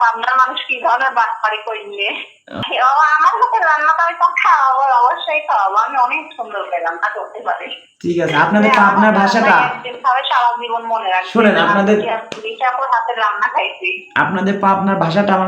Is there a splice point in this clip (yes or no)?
yes